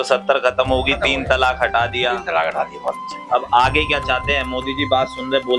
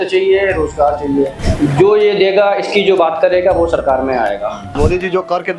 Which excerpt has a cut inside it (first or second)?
second